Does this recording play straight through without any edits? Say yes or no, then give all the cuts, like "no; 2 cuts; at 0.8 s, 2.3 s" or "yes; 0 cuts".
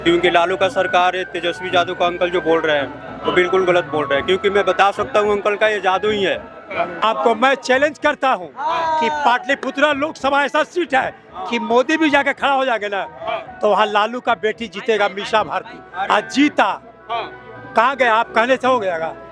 no; 1 cut; at 7.0 s